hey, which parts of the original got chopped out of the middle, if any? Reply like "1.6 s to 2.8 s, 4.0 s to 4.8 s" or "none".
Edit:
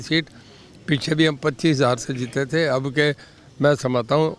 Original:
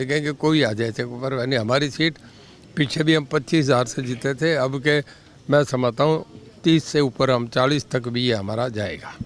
none